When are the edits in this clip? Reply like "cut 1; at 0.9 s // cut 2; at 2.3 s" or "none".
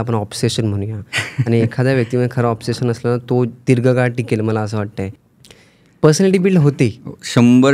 cut 1; at 5.3 s